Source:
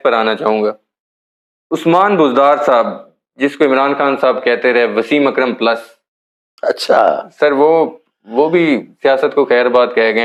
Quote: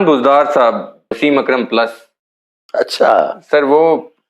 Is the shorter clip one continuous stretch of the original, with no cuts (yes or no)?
no